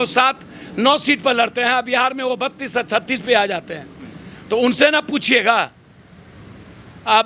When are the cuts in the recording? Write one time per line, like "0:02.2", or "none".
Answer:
none